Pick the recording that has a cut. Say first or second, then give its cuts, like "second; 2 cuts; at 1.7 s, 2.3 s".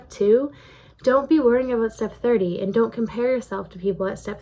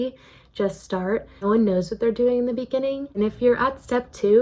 second; 2 cuts; at 1.4 s, 3.1 s